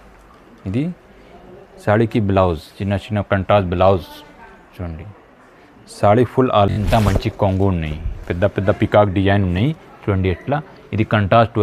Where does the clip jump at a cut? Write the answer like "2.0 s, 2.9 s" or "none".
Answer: 6.7 s